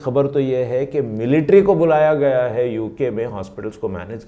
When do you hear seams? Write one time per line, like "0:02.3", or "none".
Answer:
none